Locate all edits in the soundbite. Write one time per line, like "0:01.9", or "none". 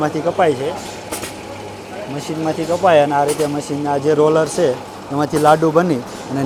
none